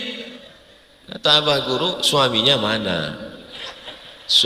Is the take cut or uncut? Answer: uncut